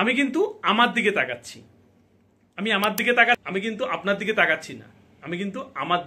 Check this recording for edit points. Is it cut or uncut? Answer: cut